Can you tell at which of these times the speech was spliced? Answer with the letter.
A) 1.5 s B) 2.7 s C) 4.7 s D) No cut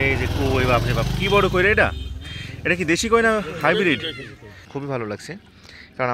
C